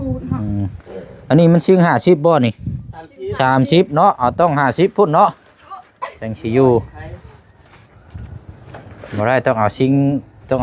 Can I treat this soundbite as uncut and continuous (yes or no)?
yes